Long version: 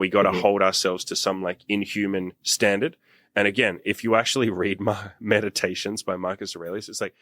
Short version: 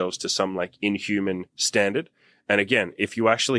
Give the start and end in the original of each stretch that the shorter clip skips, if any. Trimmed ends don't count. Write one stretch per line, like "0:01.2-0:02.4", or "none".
none